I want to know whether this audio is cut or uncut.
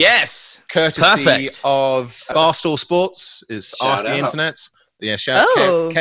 cut